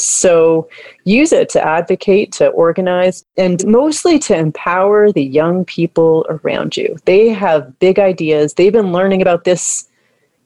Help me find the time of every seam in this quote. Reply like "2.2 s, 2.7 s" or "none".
3.6 s